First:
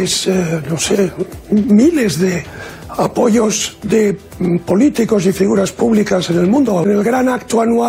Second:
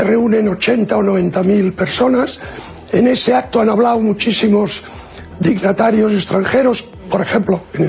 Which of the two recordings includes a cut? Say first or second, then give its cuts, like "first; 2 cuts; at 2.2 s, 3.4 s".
first; 1 cut; at 6.9 s